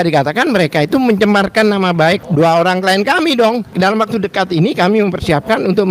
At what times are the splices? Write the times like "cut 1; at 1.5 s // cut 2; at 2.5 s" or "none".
cut 1; at 2.2 s // cut 2; at 3.7 s